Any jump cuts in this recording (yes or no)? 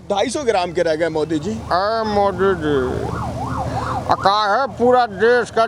yes